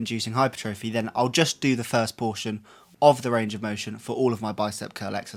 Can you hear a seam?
no; 0 cuts

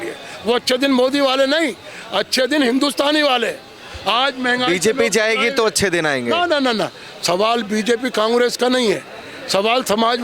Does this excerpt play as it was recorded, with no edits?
yes; 0 cuts

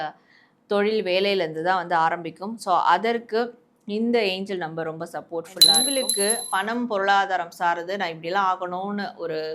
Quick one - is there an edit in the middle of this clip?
yes; 1 cut; at 5.8 s

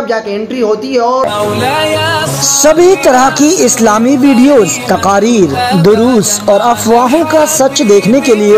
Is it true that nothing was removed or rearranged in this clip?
no; 1 cut; at 1.3 s

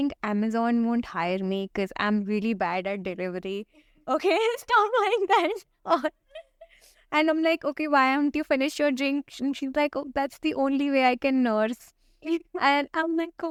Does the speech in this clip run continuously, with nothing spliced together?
yes; 0 cuts

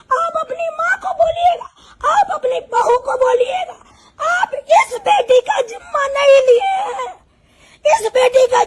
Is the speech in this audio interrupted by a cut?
no; 0 cuts

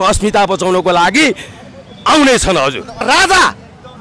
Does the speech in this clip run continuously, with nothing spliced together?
no; 1 cut; at 3.0 s

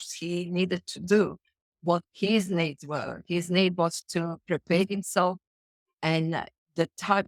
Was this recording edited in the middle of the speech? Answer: no; 0 cuts

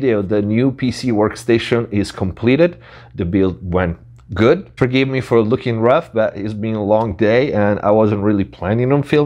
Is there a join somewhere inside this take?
no; 0 cuts

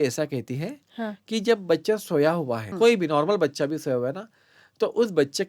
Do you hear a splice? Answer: yes; 1 cut; at 2.7 s

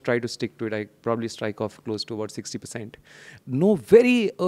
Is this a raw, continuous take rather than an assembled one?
no; 1 cut; at 3.3 s

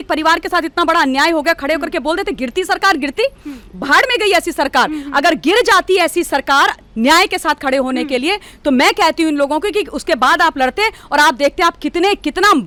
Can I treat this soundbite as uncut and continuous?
yes; 0 cuts

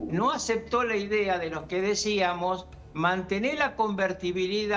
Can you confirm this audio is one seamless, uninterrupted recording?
yes; 0 cuts

